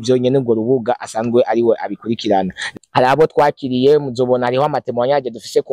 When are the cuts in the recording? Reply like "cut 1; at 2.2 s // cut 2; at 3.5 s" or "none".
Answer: cut 1; at 2.6 s